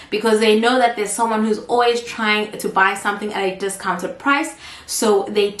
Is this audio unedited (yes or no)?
yes